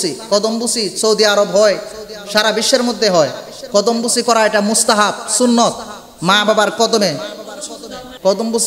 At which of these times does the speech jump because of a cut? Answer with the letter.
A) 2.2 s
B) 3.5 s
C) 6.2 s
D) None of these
D